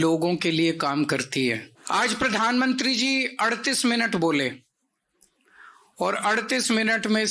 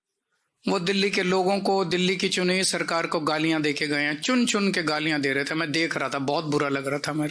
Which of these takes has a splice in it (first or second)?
first